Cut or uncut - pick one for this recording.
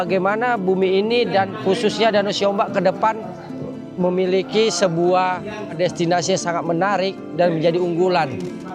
cut